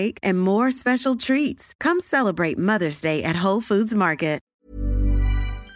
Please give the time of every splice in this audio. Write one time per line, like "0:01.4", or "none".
0:04.4